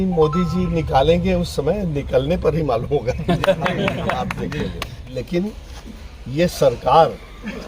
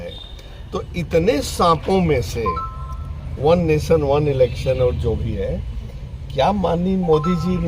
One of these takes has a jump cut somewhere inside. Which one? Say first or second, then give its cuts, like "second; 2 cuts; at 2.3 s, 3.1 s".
first; 1 cut; at 4.9 s